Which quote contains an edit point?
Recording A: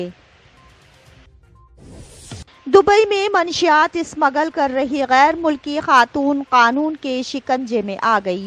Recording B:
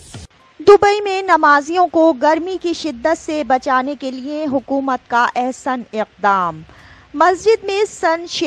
A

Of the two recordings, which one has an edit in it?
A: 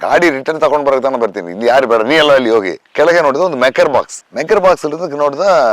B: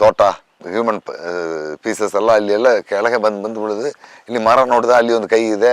A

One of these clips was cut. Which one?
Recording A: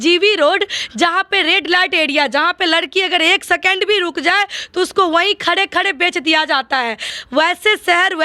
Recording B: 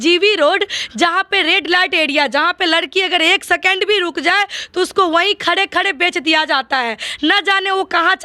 A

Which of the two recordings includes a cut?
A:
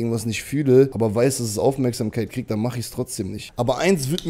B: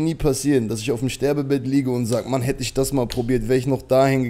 A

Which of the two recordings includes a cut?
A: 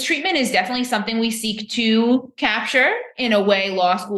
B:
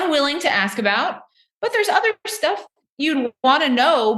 B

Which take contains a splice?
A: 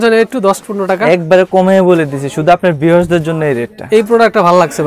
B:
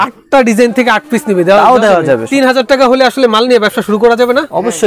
B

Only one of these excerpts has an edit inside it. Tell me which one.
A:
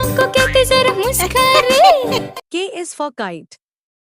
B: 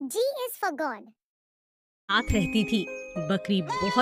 A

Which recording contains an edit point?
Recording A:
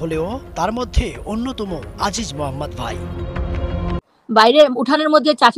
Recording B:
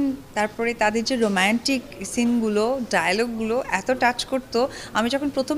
A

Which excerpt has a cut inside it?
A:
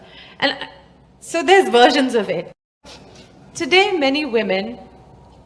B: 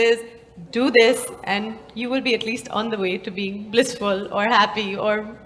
A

